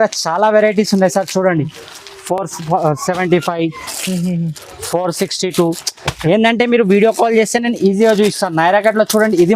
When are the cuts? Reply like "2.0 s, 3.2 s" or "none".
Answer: none